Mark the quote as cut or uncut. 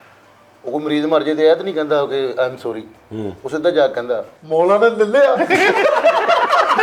uncut